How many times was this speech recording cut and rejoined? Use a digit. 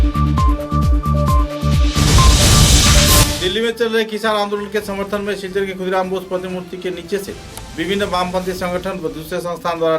1